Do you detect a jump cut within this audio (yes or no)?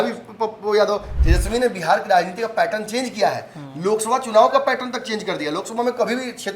yes